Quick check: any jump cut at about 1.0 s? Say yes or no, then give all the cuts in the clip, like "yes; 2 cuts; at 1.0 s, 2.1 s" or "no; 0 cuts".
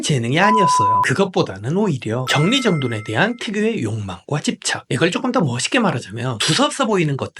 yes; 1 cut; at 1.0 s